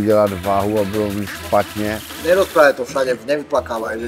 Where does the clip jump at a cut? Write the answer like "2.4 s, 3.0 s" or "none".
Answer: 2.1 s